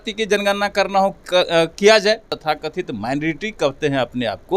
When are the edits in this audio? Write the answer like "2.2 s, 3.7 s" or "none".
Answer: 2.3 s